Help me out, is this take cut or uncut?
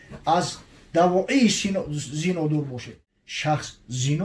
cut